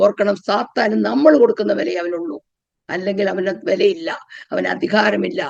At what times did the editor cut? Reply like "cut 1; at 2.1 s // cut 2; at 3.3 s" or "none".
none